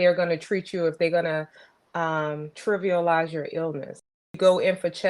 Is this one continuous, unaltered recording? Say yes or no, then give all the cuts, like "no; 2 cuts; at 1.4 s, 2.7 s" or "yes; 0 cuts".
no; 2 cuts; at 2.5 s, 4.4 s